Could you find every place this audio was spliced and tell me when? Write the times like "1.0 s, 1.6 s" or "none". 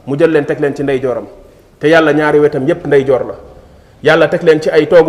none